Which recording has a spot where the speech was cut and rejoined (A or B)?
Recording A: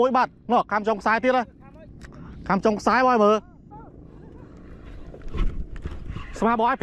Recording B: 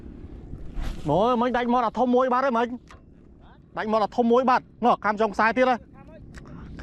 A